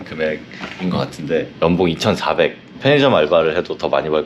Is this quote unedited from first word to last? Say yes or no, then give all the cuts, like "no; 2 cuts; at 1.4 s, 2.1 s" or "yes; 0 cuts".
no; 1 cut; at 2.7 s